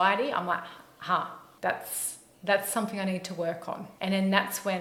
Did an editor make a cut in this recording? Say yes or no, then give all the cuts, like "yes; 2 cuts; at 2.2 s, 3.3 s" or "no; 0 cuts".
no; 0 cuts